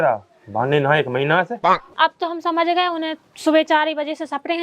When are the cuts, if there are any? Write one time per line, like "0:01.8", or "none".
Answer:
0:01.9